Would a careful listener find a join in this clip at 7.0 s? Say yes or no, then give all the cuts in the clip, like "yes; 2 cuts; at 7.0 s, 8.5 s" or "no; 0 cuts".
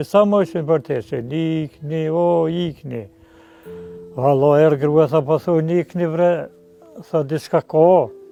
no; 0 cuts